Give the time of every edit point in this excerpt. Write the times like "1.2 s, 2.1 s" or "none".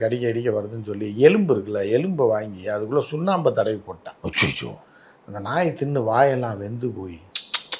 none